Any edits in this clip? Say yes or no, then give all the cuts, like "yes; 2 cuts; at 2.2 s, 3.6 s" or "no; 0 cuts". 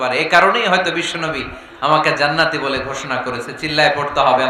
no; 0 cuts